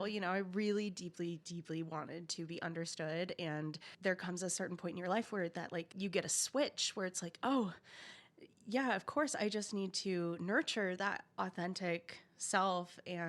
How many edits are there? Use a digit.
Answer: 2